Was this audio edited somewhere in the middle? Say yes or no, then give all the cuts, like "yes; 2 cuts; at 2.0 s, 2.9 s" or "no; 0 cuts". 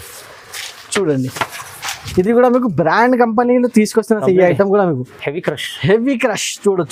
no; 0 cuts